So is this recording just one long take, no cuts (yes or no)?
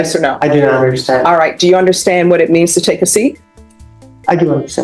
yes